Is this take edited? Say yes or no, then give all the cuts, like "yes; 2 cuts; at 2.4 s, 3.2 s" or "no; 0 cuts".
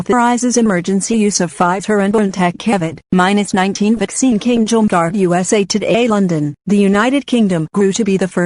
no; 0 cuts